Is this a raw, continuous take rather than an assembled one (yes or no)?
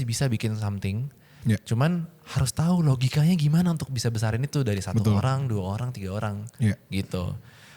yes